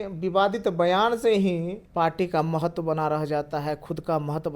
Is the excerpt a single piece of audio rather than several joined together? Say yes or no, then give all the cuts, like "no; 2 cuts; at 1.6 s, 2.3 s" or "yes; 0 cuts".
no; 1 cut; at 1.8 s